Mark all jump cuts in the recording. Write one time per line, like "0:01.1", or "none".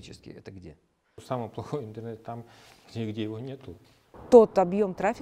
0:01.2
0:04.2